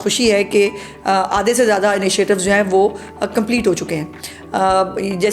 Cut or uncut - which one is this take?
uncut